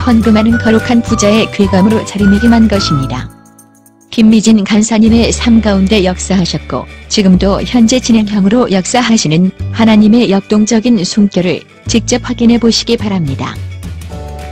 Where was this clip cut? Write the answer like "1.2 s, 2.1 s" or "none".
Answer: none